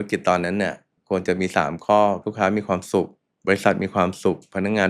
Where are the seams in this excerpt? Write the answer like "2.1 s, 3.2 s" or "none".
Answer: 0.9 s, 2.3 s, 3.2 s

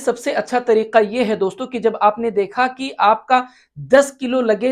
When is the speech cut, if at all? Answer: none

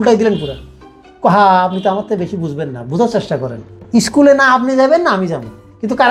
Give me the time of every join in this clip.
3.7 s

